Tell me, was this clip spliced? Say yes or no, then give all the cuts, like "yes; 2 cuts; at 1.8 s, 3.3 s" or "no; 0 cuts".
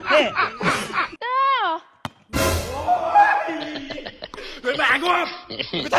yes; 1 cut; at 1.1 s